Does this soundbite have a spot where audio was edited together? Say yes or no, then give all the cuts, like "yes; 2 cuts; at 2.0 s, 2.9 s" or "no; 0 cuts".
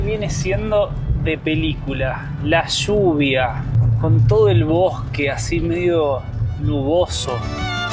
no; 0 cuts